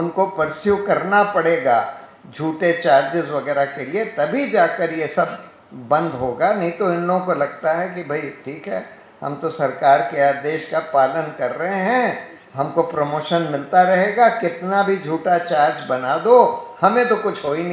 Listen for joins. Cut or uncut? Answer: uncut